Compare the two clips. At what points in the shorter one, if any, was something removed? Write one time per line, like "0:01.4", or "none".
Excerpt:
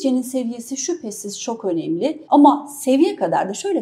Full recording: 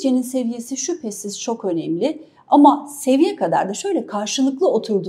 0:02.2

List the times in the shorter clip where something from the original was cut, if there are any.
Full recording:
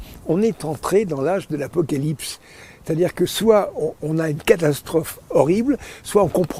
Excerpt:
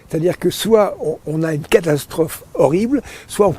none

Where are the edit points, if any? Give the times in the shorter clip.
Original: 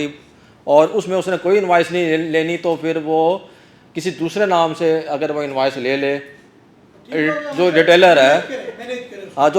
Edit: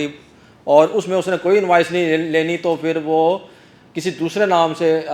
none

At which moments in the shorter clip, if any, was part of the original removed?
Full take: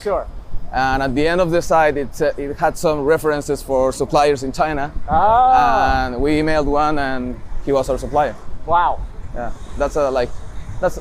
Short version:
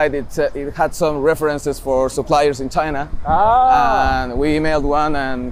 none

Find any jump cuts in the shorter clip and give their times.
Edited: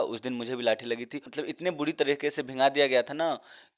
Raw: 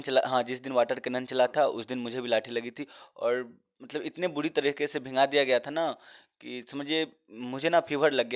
0:01.2

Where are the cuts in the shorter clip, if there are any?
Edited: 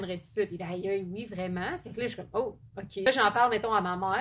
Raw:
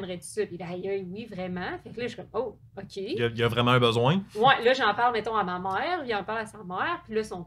0:03.1

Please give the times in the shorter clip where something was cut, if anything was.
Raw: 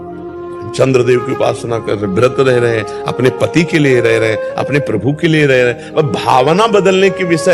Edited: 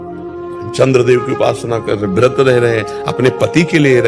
none

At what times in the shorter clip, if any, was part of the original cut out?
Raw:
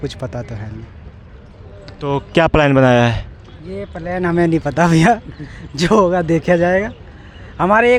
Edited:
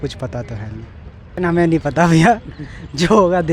0:01.2

